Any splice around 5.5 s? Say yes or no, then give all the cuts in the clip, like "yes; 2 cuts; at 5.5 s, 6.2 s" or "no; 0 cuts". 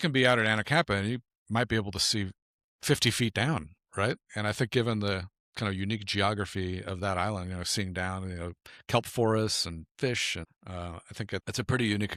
no; 0 cuts